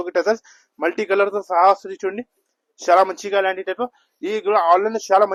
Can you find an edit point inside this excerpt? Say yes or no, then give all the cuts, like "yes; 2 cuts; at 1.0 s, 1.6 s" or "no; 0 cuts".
no; 0 cuts